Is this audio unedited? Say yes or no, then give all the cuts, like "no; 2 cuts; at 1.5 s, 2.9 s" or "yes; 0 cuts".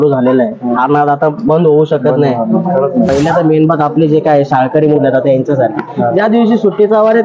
no; 1 cut; at 3.1 s